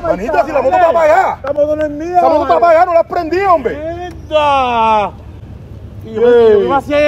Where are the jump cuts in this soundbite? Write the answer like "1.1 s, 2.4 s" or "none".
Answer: none